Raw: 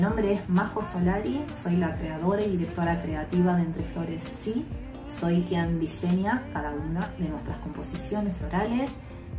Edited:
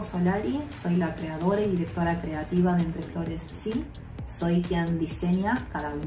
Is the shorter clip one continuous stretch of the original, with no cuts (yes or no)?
yes